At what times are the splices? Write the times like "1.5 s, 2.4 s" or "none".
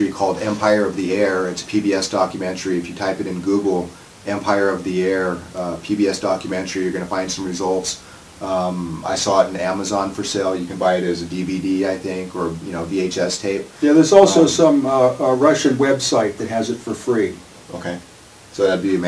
5.5 s